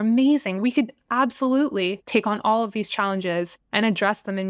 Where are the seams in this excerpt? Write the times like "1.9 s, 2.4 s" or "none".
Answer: 0.8 s, 2.0 s, 3.6 s

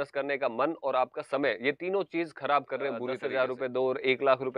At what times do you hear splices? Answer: 3.2 s

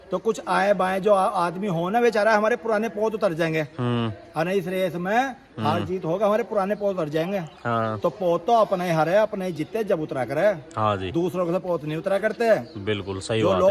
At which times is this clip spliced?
none

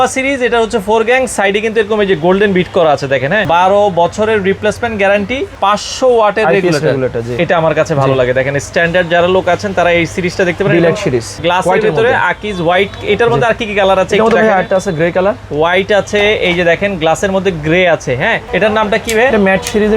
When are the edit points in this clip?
3.4 s, 5.5 s, 7.3 s, 11.3 s, 18.4 s

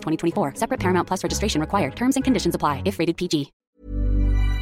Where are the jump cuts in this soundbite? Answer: 3.6 s

